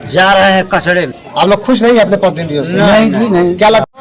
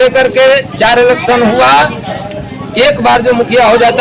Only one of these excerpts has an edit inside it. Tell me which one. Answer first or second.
first